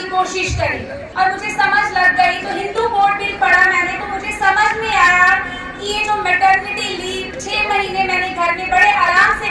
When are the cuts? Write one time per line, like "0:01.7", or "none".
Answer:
0:01.0